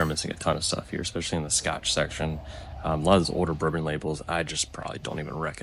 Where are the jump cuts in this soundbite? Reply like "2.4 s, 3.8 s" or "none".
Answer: none